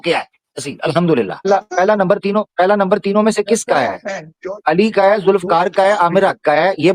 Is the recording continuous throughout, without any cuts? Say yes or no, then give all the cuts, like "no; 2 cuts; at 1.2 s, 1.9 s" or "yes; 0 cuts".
no; 1 cut; at 1.5 s